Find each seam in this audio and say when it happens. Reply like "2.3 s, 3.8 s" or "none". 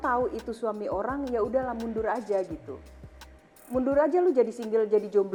none